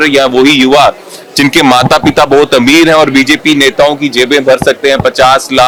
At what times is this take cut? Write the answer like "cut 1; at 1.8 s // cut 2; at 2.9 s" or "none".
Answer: none